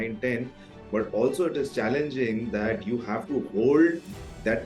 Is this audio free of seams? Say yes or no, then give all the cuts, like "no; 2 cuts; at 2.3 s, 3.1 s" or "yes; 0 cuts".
yes; 0 cuts